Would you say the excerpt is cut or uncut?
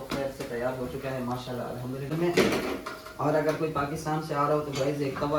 cut